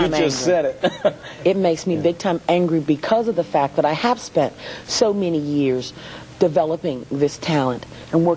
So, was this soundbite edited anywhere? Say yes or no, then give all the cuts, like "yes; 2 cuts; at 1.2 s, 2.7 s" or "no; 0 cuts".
no; 0 cuts